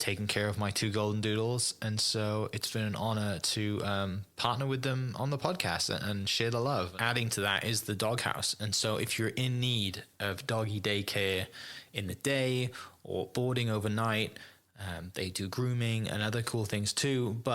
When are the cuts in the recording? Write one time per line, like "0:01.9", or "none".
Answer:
0:06.9